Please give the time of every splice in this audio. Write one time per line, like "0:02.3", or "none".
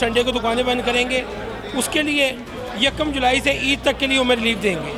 none